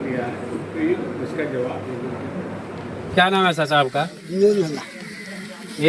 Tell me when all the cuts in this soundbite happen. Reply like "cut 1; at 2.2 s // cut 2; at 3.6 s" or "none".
cut 1; at 3.1 s